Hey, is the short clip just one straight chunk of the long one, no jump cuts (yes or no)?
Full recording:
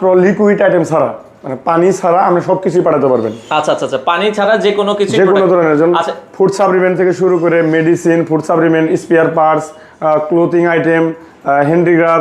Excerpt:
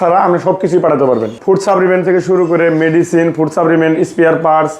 no